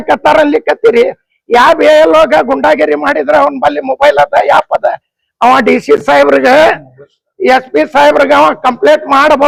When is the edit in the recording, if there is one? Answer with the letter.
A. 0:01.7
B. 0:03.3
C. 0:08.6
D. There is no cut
D